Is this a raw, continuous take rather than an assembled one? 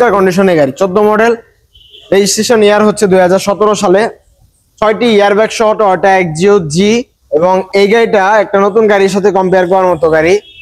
no; 1 cut; at 7.1 s

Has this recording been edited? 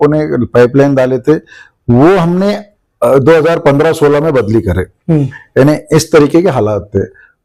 no; 0 cuts

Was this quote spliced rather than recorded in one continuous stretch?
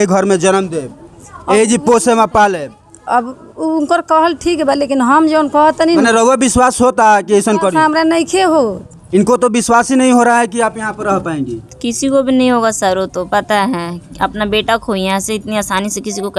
no; 0 cuts

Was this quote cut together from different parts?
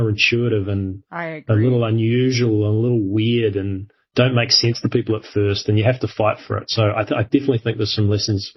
no; 0 cuts

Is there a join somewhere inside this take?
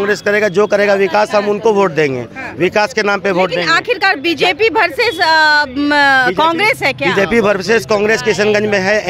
no; 0 cuts

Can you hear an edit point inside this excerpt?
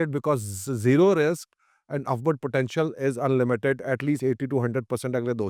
no; 0 cuts

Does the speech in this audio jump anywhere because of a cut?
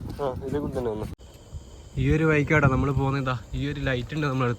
yes; 1 cut; at 1.1 s

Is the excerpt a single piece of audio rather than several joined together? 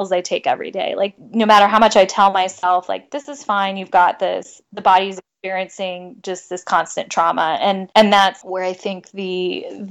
no; 3 cuts; at 1.1 s, 7.8 s, 8.4 s

